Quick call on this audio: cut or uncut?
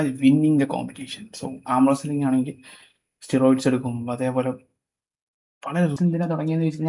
cut